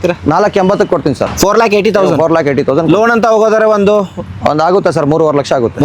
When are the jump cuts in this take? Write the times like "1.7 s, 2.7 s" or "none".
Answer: none